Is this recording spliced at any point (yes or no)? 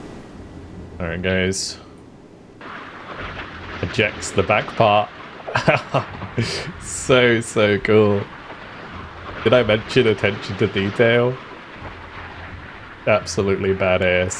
no